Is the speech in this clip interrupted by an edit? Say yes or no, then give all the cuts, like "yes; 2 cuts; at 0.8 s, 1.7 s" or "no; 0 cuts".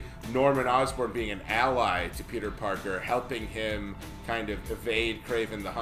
no; 0 cuts